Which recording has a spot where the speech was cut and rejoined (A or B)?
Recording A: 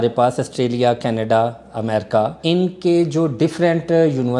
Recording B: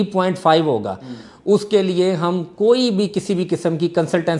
A